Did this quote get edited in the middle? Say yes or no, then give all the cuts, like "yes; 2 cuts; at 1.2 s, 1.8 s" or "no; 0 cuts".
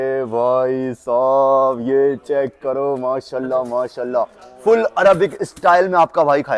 no; 0 cuts